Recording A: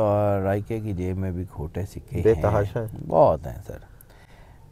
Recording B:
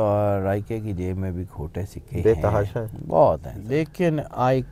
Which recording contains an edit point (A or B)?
B